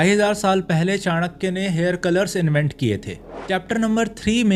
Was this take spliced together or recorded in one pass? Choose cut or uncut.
cut